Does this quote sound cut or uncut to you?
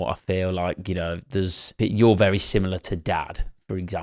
cut